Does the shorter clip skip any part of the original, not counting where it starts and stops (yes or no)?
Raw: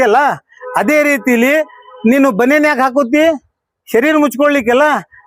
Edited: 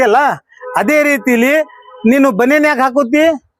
no